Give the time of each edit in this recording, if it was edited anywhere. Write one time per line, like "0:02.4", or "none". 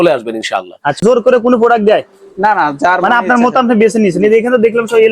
0:01.0